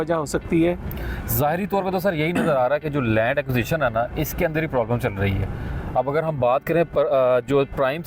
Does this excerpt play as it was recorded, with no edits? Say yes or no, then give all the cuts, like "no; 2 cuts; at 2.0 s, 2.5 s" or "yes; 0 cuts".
yes; 0 cuts